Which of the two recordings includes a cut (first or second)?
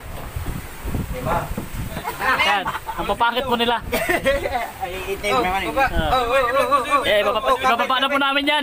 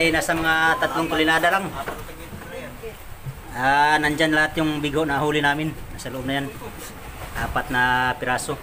first